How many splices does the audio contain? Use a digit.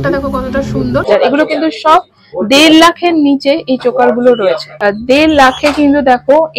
2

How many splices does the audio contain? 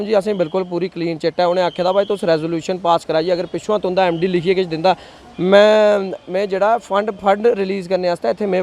0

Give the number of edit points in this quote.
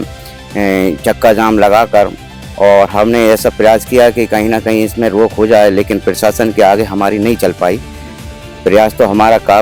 0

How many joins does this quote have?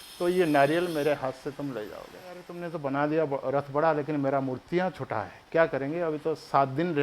1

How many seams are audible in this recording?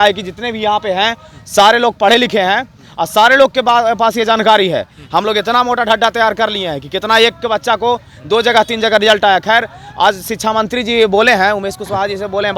0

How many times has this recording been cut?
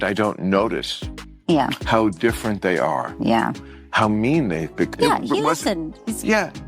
1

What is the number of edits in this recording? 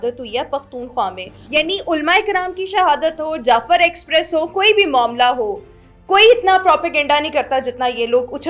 1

